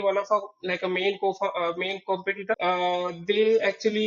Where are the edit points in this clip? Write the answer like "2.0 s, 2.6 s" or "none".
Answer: 2.6 s